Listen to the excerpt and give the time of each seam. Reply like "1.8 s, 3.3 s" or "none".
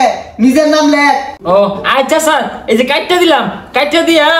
none

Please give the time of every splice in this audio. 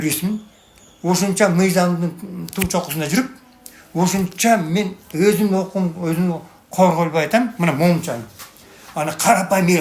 none

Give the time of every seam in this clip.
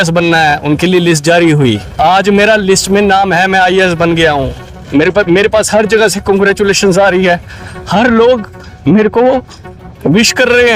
1.9 s

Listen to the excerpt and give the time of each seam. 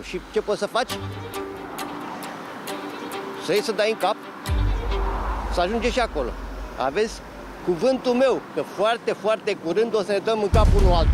none

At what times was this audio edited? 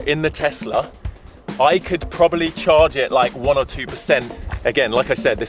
4.4 s

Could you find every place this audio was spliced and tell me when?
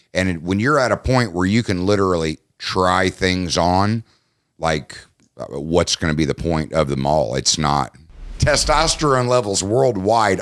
8.3 s

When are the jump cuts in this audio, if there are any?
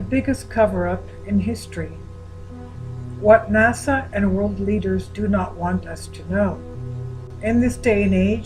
4.9 s

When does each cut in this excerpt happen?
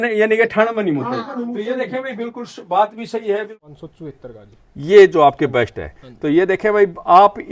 3.6 s

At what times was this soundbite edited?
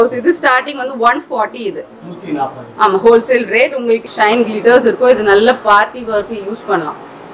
4.1 s

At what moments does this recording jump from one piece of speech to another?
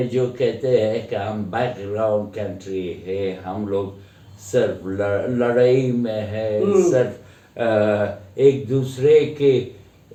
none

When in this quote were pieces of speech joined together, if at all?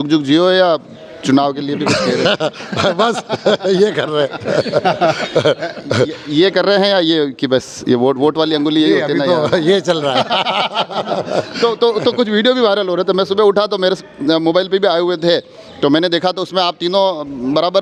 none

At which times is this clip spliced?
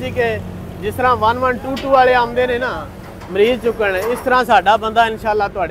none

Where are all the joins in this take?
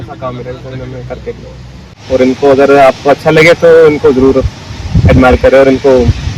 2.0 s

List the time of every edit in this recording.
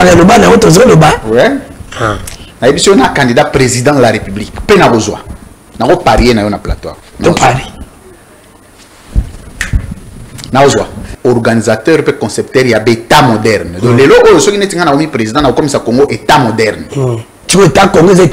11.0 s

